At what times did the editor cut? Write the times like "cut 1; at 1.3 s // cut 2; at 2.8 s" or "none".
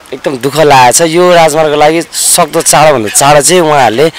none

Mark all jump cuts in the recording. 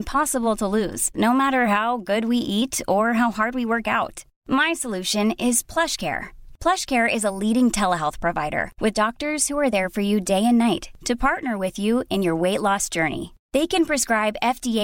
none

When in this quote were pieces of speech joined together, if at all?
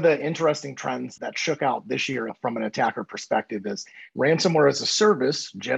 cut 1; at 1.1 s

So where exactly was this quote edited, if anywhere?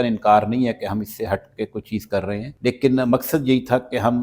cut 1; at 2.5 s

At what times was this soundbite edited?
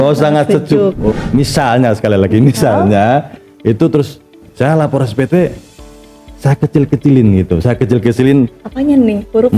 cut 1; at 1.1 s

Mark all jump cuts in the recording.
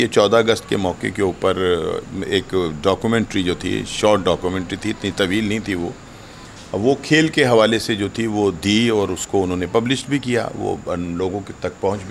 none

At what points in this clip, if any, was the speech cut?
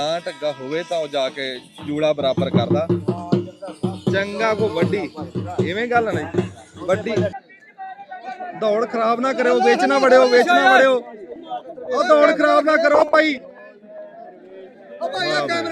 cut 1; at 7.4 s

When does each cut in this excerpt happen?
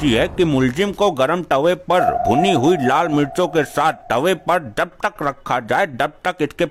none

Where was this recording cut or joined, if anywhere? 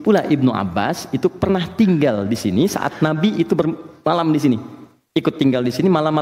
none

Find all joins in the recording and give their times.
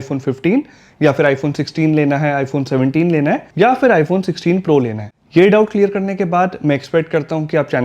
cut 1; at 3.5 s

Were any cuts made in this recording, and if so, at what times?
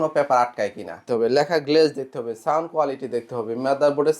cut 1; at 1.0 s

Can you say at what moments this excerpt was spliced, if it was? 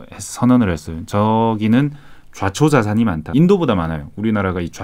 cut 1; at 3.3 s

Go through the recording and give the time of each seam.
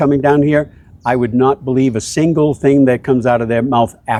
none

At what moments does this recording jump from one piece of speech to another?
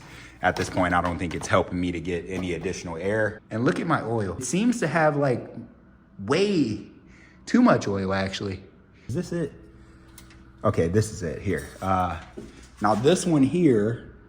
cut 1; at 3.4 s // cut 2; at 4.4 s // cut 3; at 9.1 s

